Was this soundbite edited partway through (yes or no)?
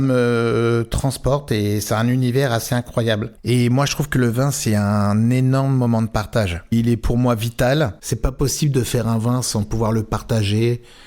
yes